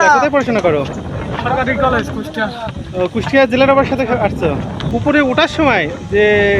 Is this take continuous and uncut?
no; 1 cut; at 4.9 s

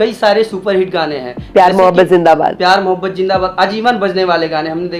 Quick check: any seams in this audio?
no; 0 cuts

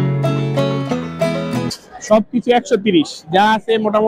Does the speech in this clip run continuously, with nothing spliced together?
no; 1 cut; at 1.8 s

